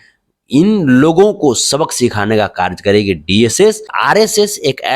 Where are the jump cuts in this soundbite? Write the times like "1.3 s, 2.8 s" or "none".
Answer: 3.9 s